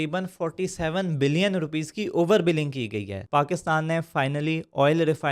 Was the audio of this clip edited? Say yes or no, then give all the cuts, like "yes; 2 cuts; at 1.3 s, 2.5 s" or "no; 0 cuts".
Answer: yes; 1 cut; at 3.1 s